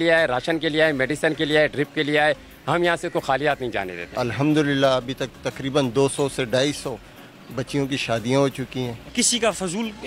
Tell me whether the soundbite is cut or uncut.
cut